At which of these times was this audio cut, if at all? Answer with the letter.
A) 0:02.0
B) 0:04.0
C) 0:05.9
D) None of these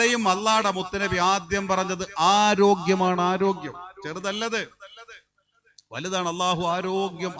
D